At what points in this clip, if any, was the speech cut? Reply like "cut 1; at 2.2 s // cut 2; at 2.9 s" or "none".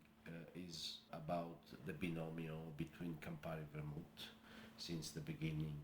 cut 1; at 1.1 s // cut 2; at 1.7 s